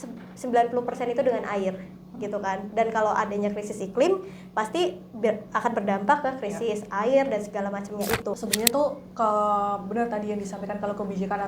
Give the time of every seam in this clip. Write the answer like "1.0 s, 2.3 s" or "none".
8.4 s